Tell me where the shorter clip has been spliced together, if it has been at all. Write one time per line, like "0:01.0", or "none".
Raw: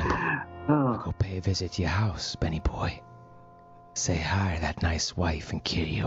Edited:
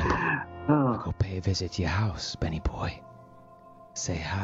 none